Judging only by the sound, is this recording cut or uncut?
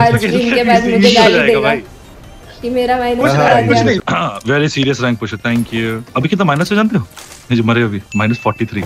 uncut